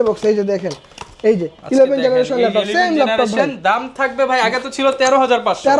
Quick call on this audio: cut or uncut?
uncut